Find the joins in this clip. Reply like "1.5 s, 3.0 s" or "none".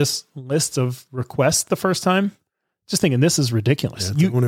none

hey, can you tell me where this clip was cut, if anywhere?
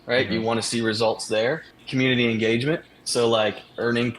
1.7 s

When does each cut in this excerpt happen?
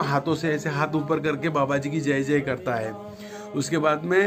none

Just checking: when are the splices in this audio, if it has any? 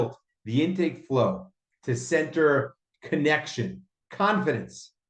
none

